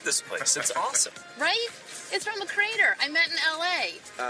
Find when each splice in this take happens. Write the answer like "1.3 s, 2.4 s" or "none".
none